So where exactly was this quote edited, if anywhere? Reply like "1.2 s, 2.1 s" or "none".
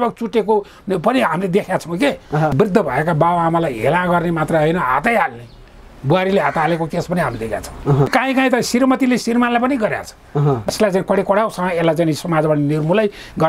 2.5 s, 8.1 s, 10.7 s